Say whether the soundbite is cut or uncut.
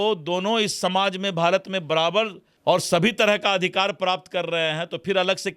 cut